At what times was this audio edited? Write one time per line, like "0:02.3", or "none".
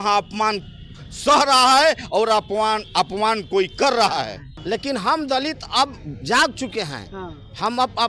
0:04.5